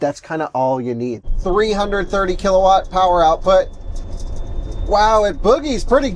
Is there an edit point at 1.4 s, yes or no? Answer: yes